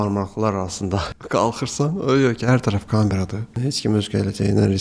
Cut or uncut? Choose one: cut